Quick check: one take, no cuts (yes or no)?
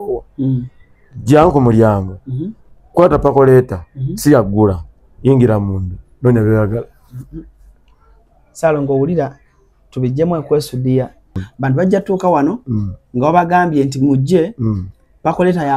no